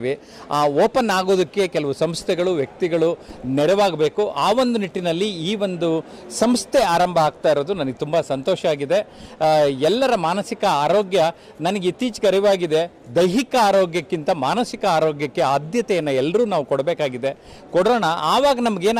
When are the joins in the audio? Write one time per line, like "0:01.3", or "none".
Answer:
none